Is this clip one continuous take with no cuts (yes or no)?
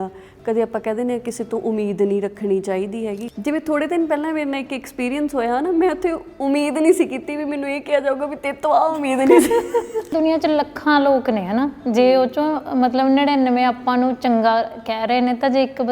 no